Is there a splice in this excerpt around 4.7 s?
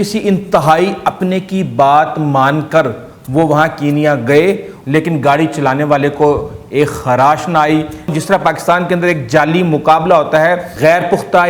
yes; 3 cuts; at 4.7 s, 8.1 s, 10.7 s

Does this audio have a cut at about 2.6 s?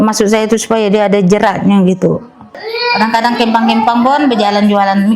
yes; 1 cut; at 2.6 s

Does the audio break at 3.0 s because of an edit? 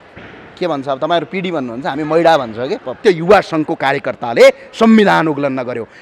yes; 1 cut; at 3.0 s

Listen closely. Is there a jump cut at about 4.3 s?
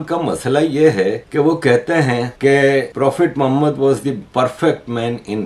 no; 3 cuts; at 1.2 s, 2.3 s, 2.9 s

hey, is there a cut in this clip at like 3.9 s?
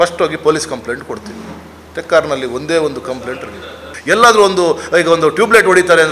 yes; 1 cut; at 3.9 s

